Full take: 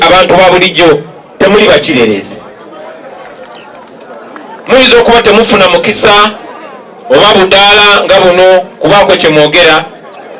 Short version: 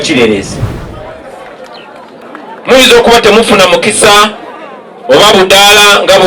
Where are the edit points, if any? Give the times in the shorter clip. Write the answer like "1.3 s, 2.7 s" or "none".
2.2 s